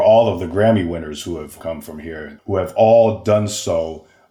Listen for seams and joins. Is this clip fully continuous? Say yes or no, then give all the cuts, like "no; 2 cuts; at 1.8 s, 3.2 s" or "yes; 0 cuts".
no; 1 cut; at 1.8 s